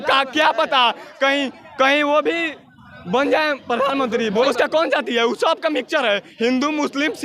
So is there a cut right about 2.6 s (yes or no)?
no